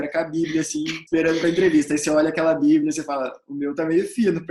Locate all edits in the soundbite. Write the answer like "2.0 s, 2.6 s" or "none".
1.0 s